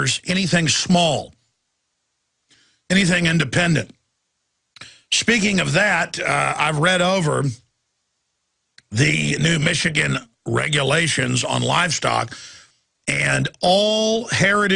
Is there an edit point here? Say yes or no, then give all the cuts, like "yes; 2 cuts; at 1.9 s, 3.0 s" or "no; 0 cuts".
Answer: yes; 1 cut; at 2.8 s